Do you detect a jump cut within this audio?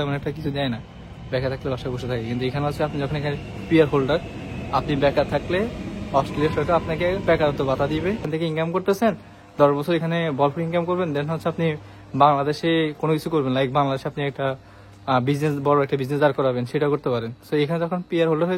yes; 1 cut; at 8.3 s

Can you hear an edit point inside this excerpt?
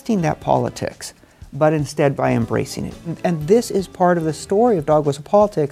yes; 1 cut; at 3.1 s

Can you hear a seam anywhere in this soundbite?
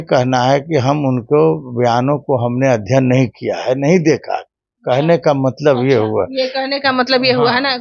no; 0 cuts

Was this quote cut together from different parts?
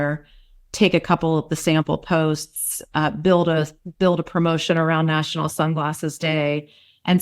no; 0 cuts

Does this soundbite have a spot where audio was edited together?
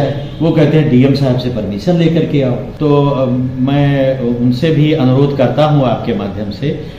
yes; 1 cut; at 2.7 s

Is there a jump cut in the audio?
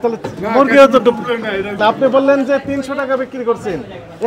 yes; 1 cut; at 1.8 s

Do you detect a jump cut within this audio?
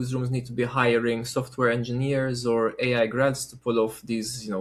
no; 0 cuts

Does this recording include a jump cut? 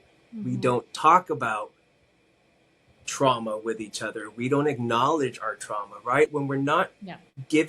yes; 1 cut; at 6.3 s

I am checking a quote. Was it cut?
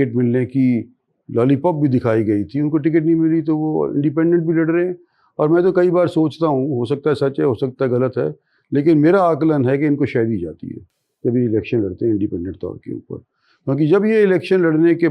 no; 0 cuts

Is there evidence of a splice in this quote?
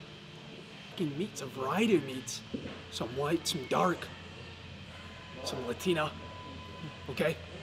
yes; 1 cut; at 0.9 s

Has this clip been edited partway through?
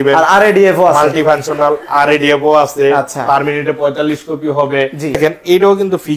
yes; 1 cut; at 5.2 s

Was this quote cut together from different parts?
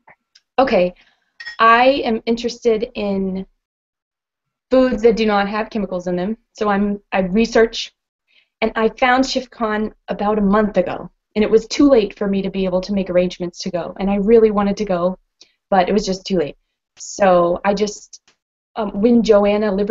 no; 0 cuts

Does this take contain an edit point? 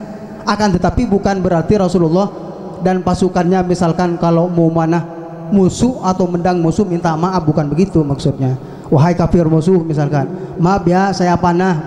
no; 0 cuts

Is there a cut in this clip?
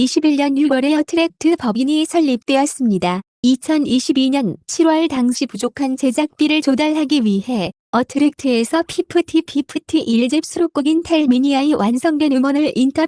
no; 0 cuts

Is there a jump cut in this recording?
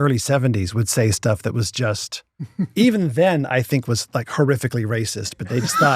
no; 0 cuts

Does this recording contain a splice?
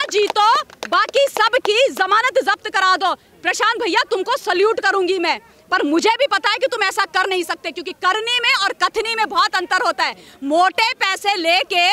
no; 0 cuts

